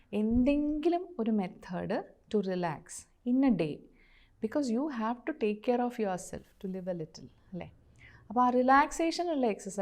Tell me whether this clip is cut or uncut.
uncut